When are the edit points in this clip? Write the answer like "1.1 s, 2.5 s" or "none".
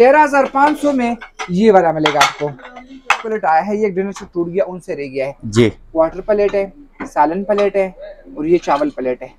3.3 s

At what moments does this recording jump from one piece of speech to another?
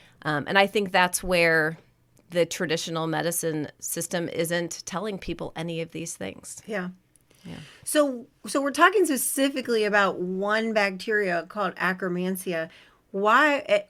none

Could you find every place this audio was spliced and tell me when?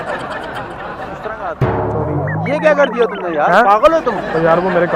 none

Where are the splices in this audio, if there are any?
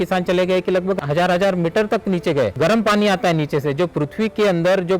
1.0 s, 2.5 s

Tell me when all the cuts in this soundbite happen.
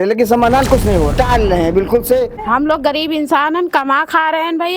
1.1 s, 2.3 s

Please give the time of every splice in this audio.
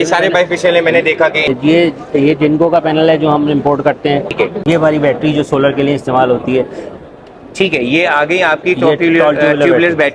1.4 s, 4.3 s

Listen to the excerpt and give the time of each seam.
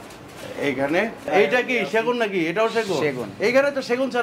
1.3 s

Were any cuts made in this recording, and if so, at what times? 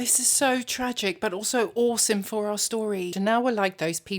3.1 s

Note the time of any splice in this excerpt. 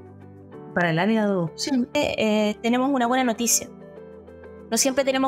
1.9 s

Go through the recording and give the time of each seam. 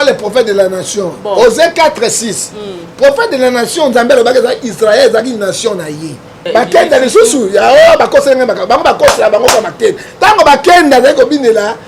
6.4 s

